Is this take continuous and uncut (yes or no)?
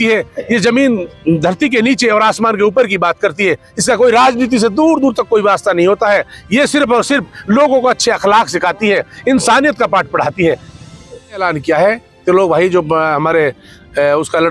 no